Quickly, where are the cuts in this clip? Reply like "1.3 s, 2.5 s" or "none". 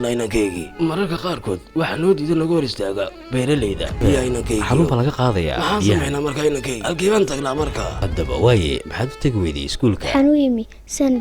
4.0 s, 8.0 s